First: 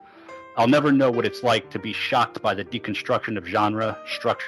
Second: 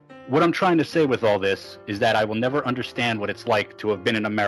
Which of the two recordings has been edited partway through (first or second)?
first